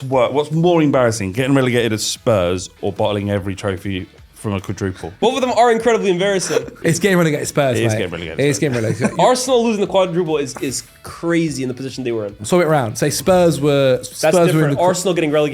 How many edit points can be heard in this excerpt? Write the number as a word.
four